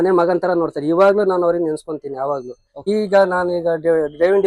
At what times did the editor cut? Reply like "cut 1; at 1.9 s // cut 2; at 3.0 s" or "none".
cut 1; at 2.9 s